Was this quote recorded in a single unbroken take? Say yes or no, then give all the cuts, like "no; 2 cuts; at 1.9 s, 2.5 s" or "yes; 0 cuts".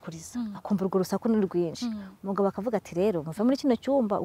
yes; 0 cuts